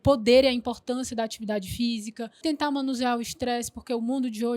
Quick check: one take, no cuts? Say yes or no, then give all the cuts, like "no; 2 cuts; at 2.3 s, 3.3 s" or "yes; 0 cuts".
no; 1 cut; at 2.4 s